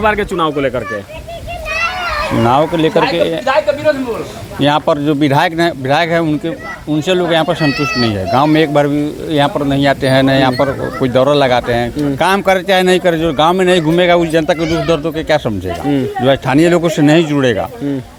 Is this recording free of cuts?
yes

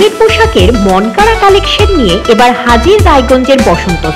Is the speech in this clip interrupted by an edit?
no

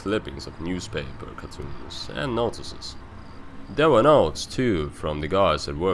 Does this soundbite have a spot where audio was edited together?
yes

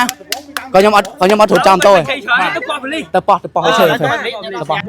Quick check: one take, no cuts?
yes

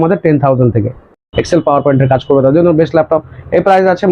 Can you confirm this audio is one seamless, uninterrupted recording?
no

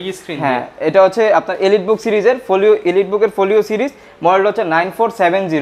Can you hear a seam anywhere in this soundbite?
no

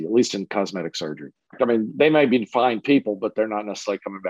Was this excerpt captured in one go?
no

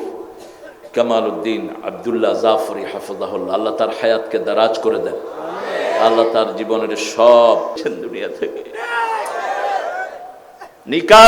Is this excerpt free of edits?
no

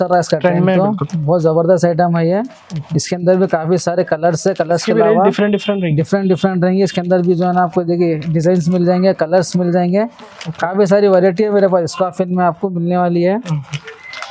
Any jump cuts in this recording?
no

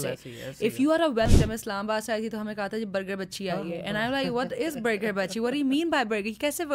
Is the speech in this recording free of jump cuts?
no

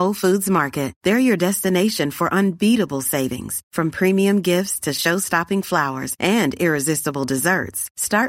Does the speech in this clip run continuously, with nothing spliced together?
yes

